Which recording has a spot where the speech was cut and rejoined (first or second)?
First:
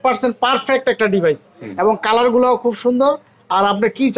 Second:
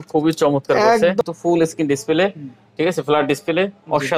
second